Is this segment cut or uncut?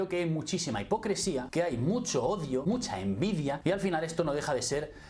cut